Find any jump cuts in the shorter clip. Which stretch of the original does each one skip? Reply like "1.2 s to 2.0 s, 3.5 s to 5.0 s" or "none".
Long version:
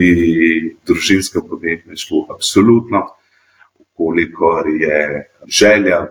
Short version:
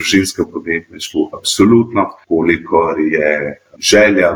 3.1 s to 3.9 s